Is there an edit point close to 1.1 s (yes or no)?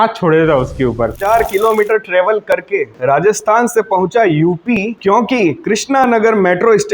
yes